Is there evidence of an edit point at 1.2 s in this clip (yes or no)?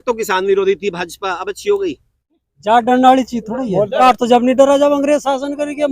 no